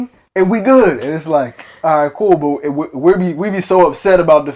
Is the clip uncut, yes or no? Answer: yes